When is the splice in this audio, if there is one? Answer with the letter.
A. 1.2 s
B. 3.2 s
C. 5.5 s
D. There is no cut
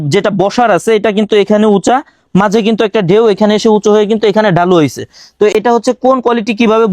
D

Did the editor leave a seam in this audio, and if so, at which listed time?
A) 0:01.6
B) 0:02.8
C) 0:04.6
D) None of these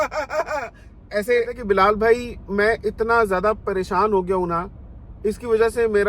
A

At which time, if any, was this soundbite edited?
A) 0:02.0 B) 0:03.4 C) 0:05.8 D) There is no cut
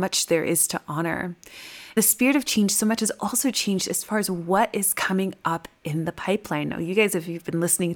A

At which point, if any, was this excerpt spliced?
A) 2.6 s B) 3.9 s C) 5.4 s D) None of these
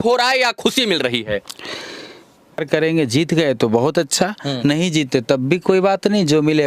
A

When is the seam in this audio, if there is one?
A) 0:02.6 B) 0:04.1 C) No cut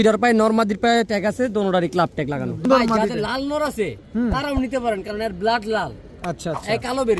A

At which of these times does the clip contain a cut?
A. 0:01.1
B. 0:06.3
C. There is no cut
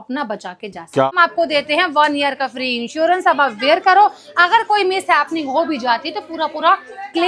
A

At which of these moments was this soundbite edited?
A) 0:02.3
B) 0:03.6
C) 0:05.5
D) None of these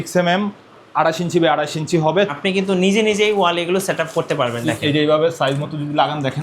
A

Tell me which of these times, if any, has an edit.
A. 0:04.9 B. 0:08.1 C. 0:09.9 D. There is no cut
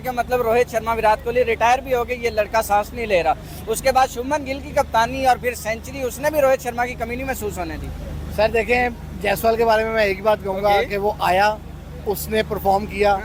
D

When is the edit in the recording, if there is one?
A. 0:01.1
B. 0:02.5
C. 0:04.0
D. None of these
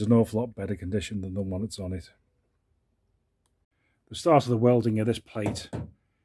A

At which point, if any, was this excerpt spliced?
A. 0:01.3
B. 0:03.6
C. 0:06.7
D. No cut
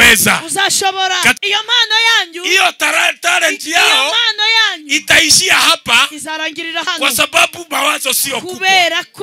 A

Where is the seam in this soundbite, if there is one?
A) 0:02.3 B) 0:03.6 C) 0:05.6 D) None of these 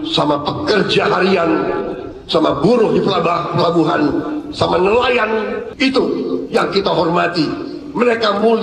C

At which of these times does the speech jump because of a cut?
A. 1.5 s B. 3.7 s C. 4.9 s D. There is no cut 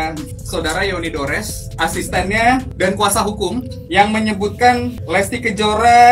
B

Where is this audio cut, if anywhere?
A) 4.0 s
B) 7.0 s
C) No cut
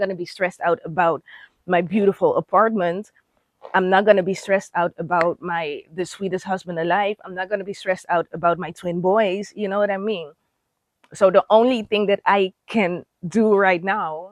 C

